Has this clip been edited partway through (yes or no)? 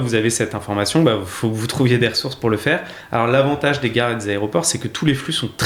no